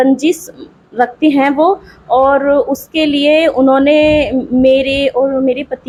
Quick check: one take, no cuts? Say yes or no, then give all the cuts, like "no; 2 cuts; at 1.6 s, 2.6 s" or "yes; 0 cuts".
yes; 0 cuts